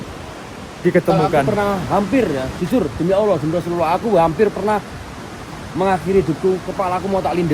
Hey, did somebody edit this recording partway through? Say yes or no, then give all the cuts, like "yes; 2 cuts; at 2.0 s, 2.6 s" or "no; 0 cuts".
yes; 1 cut; at 1.5 s